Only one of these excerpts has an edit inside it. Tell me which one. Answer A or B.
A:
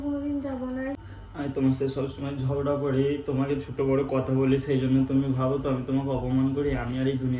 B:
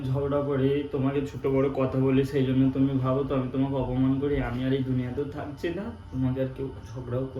A